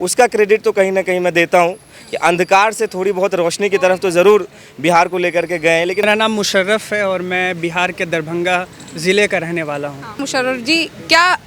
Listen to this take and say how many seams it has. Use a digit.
2